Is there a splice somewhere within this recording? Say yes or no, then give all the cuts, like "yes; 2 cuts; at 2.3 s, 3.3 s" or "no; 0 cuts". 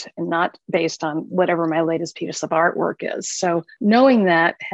yes; 1 cut; at 3.7 s